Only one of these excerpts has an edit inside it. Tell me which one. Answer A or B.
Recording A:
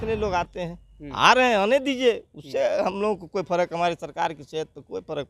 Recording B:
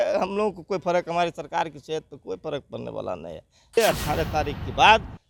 B